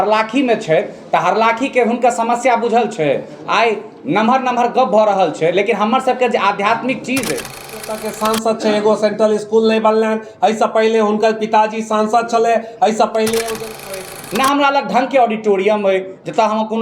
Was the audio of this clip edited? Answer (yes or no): yes